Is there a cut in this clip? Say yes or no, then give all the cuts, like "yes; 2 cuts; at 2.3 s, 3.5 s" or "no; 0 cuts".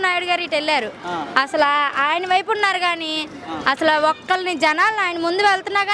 no; 0 cuts